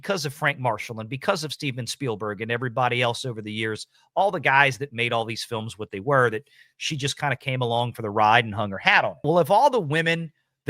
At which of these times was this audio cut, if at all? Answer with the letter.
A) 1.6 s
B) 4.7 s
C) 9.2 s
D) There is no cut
C